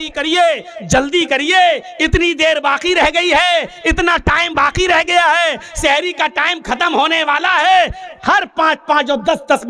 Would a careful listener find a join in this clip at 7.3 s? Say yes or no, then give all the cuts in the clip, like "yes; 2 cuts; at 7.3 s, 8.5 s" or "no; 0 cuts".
no; 0 cuts